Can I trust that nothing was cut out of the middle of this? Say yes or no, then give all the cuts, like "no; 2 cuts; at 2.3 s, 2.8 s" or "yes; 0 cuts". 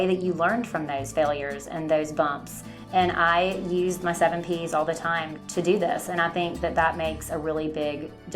no; 1 cut; at 5.4 s